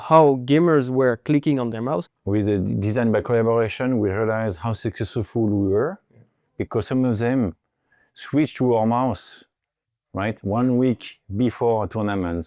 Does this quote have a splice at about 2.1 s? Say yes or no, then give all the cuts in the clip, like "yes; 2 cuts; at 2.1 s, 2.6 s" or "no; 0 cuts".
yes; 1 cut; at 2.1 s